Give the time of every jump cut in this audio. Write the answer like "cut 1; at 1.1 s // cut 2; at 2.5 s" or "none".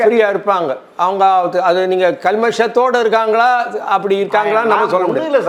none